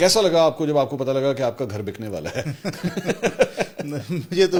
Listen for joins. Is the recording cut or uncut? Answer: uncut